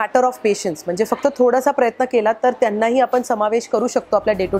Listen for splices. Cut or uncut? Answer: uncut